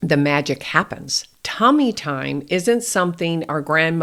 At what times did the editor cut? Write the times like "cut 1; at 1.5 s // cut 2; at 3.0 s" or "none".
none